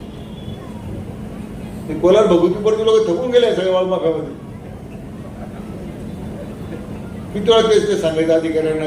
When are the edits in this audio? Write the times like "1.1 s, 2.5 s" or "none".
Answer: none